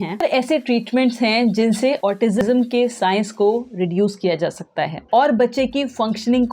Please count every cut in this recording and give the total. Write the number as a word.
one